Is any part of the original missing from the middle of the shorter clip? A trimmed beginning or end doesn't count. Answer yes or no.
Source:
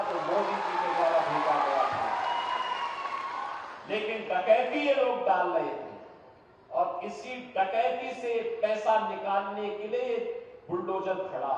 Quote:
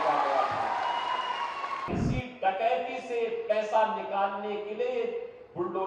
yes